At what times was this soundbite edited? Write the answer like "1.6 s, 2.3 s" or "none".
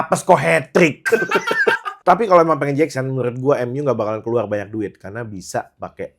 1.9 s